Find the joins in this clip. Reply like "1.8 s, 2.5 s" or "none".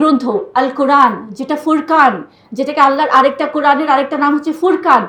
none